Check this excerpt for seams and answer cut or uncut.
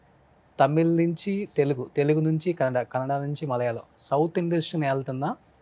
uncut